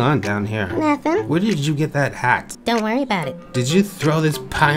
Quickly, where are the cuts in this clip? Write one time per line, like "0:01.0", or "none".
none